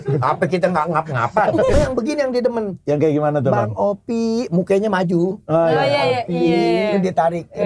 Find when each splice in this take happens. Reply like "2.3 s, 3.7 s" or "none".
1.7 s